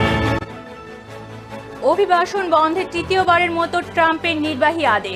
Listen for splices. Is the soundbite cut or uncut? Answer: uncut